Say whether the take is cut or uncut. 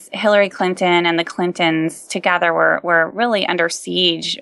uncut